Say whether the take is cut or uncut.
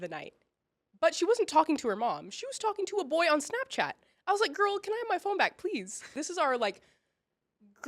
cut